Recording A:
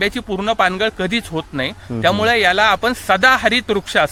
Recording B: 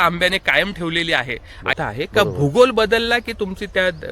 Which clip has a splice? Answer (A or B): B